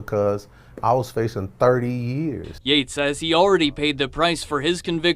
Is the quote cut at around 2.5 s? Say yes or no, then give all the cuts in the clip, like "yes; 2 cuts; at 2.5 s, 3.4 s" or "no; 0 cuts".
yes; 1 cut; at 2.5 s